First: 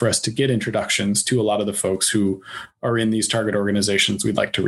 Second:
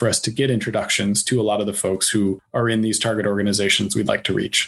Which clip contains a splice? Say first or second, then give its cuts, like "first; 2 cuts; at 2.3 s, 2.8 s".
second; 1 cut; at 2.4 s